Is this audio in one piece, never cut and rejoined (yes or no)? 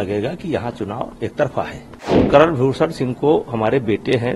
no